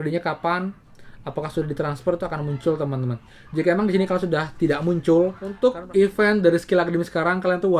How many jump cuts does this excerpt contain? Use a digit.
1